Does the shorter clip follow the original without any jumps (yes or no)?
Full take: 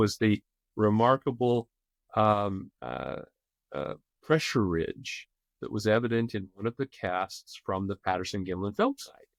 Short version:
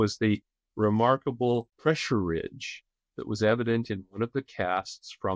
no